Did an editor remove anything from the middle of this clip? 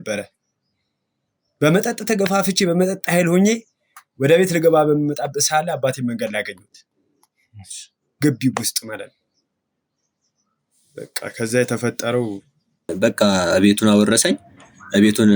yes; 1 cut; at 12.9 s

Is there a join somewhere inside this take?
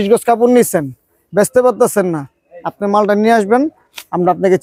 no; 0 cuts

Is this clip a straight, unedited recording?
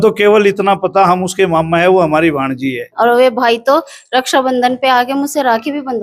no; 1 cut; at 2.9 s

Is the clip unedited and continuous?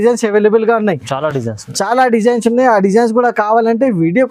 yes; 0 cuts

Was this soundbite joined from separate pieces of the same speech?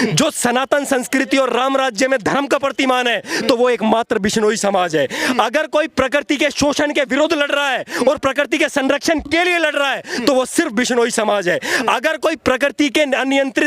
no; 0 cuts

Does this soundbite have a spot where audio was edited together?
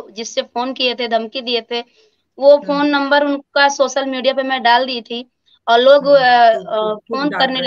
no; 0 cuts

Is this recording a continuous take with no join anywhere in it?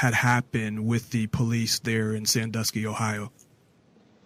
yes; 0 cuts

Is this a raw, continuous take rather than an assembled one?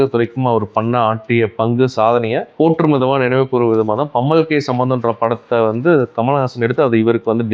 yes; 0 cuts

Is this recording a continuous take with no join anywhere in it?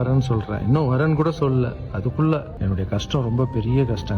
no; 1 cut; at 2.5 s

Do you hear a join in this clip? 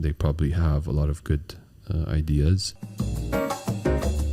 yes; 1 cut; at 2.8 s

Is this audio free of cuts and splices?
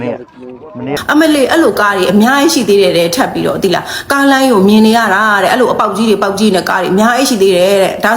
no; 2 cuts; at 0.9 s, 2.8 s

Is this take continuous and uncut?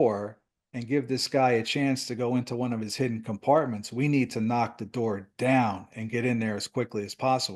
yes; 0 cuts

